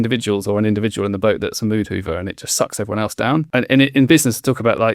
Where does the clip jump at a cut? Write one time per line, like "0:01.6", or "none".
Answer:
0:03.5